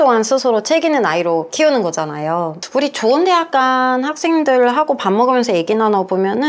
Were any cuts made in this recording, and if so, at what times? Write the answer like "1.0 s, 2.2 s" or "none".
2.6 s